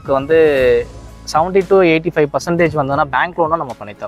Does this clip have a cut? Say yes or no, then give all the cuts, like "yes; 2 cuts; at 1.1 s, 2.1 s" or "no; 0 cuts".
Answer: no; 0 cuts